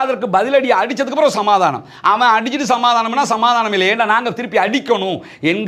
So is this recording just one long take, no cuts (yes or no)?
yes